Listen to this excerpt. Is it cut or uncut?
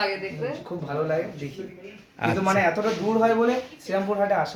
uncut